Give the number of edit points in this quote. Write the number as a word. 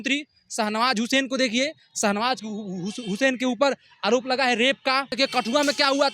one